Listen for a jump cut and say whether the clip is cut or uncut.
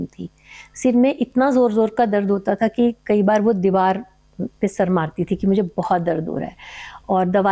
uncut